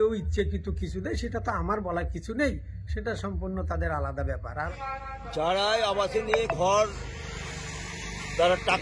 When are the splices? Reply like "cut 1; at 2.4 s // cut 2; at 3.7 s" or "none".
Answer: cut 1; at 4.7 s

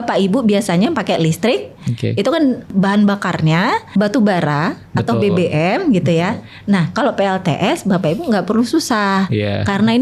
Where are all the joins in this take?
cut 1; at 2.7 s // cut 2; at 3.9 s

